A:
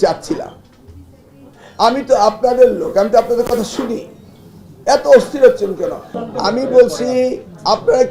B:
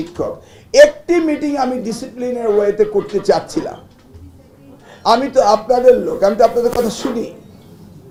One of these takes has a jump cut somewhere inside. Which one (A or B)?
A